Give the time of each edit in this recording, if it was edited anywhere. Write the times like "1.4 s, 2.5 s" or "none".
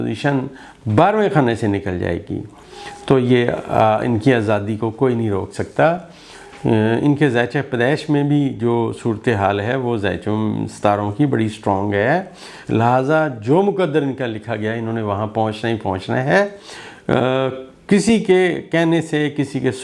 none